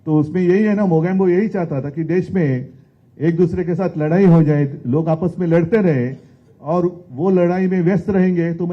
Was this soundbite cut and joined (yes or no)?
no